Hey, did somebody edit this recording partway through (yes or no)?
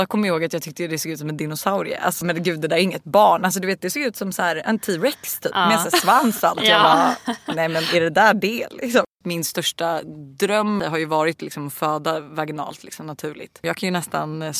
yes